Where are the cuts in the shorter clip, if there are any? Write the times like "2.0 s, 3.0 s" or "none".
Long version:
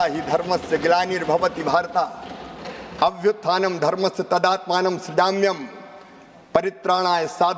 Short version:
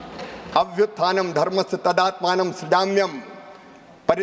none